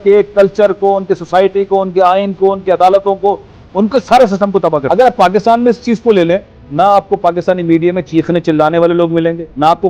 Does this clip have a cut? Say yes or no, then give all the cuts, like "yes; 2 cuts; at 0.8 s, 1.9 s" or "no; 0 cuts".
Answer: yes; 2 cuts; at 4.8 s, 6.6 s